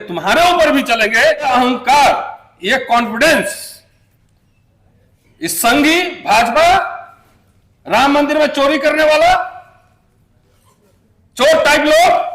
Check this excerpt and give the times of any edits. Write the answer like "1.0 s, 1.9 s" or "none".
1.5 s